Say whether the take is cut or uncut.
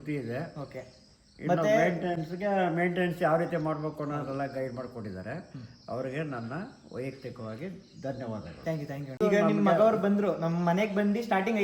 cut